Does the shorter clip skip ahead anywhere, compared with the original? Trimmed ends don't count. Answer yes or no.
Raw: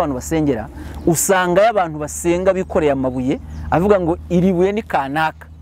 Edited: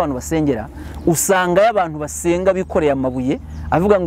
no